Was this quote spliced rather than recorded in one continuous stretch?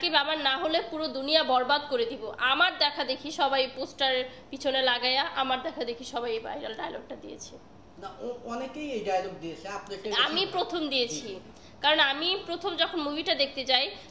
no; 0 cuts

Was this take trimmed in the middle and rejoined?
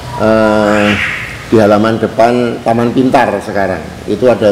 no; 0 cuts

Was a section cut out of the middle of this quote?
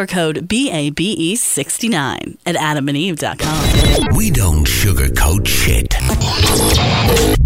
yes; 1 cut; at 3.5 s

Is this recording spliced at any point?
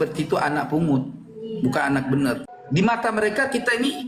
yes; 1 cut; at 2.5 s

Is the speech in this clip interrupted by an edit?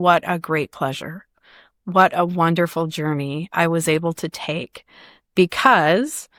no; 0 cuts

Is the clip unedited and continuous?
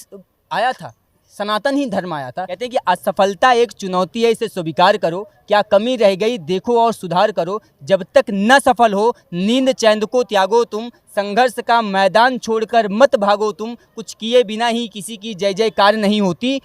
no; 1 cut; at 2.5 s

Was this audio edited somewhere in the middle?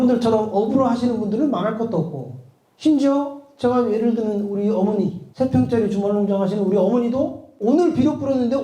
yes; 1 cut; at 5.2 s

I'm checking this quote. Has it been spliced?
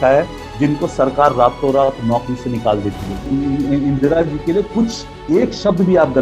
yes; 1 cut; at 3.2 s

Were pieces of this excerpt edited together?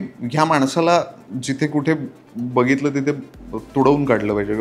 no; 0 cuts

